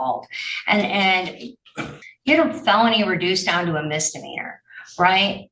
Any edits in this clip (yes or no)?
yes